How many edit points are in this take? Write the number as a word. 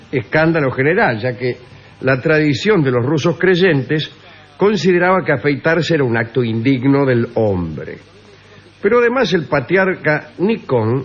one